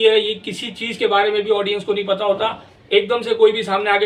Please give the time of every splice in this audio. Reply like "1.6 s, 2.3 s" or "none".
none